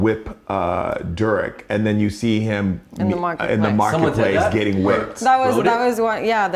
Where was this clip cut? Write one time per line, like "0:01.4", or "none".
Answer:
none